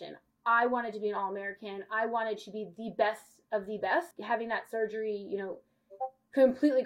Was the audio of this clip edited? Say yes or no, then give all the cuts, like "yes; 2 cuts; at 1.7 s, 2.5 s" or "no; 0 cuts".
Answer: yes; 1 cut; at 4.1 s